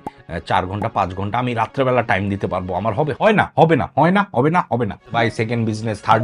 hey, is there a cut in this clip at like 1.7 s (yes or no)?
no